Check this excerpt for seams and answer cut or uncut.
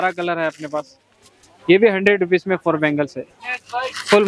cut